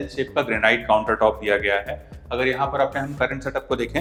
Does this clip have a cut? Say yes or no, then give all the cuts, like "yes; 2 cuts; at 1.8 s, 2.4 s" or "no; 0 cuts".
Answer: no; 0 cuts